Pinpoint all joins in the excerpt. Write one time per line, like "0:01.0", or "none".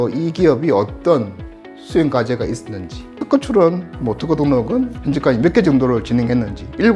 0:03.2
0:05.0